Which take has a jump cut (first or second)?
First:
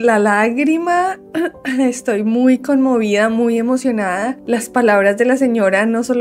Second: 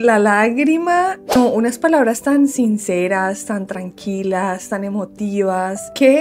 second